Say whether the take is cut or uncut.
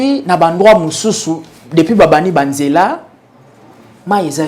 uncut